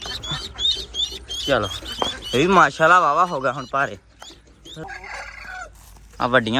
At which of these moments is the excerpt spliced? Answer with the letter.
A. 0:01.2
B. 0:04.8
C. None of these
B